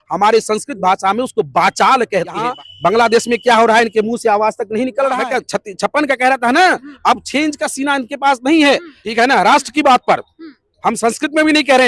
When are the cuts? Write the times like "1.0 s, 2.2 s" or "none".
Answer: 2.5 s, 5.2 s, 8.9 s